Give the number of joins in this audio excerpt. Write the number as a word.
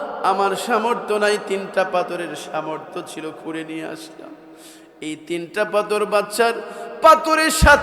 zero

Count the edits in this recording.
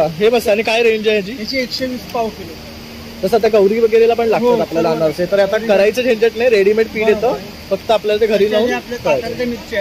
zero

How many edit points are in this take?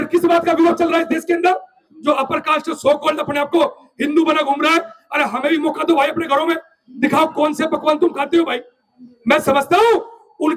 one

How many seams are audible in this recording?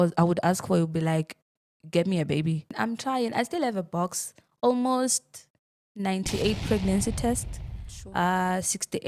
one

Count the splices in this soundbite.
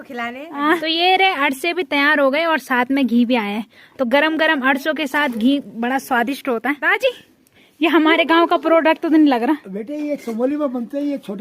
two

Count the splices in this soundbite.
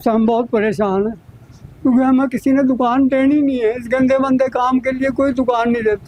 zero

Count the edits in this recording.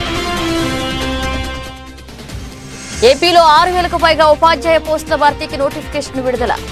one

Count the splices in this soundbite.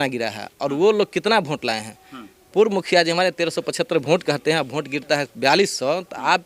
zero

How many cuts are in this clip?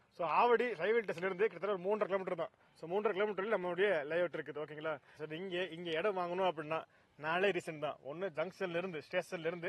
one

